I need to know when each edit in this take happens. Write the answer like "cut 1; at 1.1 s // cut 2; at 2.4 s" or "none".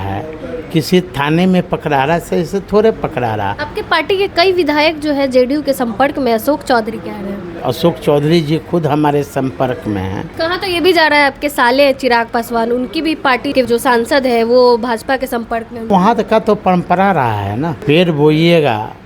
cut 1; at 3.7 s // cut 2; at 7.5 s // cut 3; at 10.3 s // cut 4; at 13.6 s // cut 5; at 15.9 s // cut 6; at 17.8 s